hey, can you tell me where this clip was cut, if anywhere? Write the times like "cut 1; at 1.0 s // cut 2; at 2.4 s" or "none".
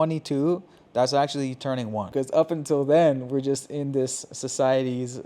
cut 1; at 2.1 s